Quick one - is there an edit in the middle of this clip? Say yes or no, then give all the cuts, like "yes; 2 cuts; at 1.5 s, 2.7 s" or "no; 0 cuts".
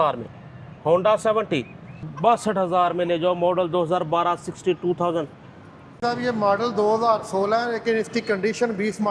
yes; 2 cuts; at 2.0 s, 6.0 s